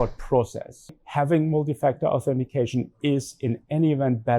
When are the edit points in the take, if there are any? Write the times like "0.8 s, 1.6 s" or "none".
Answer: 1.0 s